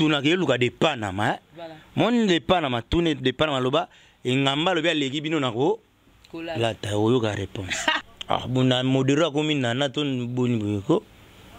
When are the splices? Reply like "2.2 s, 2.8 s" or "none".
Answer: 8.0 s